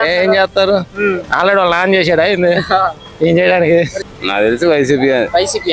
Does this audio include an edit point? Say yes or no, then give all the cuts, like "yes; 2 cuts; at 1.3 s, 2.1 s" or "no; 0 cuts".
yes; 1 cut; at 4.0 s